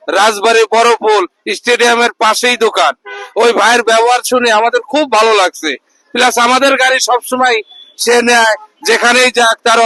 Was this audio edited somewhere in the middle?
no; 0 cuts

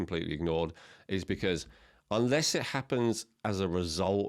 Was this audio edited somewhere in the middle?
no; 0 cuts

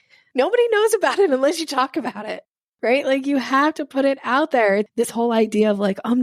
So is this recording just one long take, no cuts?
no; 1 cut; at 4.9 s

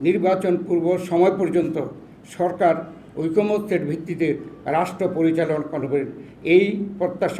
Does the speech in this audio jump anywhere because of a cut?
no; 0 cuts

